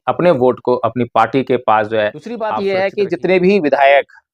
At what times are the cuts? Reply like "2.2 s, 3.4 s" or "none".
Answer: 2.6 s